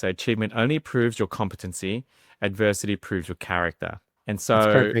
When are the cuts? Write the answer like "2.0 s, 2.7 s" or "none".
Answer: 4.1 s